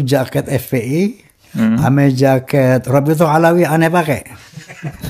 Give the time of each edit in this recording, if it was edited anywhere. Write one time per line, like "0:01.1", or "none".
none